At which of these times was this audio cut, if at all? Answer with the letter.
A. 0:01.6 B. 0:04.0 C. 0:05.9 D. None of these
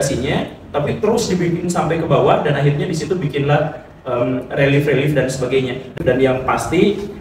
C